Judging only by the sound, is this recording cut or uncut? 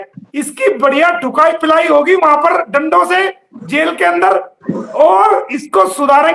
uncut